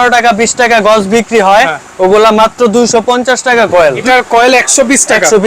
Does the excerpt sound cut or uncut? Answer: cut